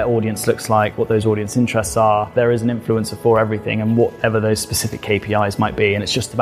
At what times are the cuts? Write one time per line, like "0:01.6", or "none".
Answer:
0:02.3